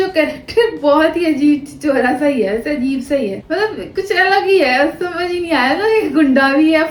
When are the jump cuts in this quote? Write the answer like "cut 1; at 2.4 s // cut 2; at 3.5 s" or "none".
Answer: none